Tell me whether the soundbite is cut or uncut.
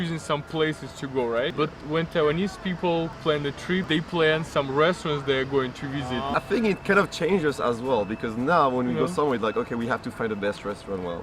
cut